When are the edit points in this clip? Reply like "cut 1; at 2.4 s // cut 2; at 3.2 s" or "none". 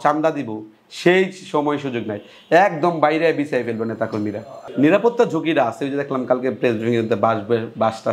none